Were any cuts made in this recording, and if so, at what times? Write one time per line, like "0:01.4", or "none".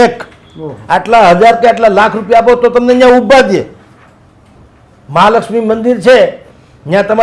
none